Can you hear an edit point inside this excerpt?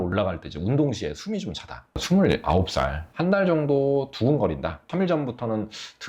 yes; 1 cut; at 2.0 s

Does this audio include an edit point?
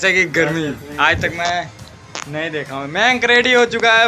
no; 0 cuts

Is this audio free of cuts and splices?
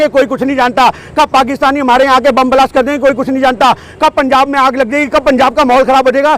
yes; 0 cuts

